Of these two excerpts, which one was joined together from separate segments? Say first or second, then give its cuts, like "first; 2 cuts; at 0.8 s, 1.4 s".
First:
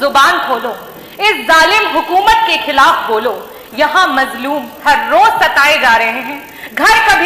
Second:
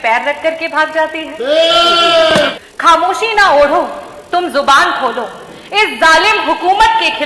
second; 1 cut; at 2.5 s